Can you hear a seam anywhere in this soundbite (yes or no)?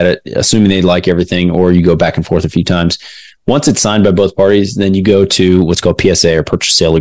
no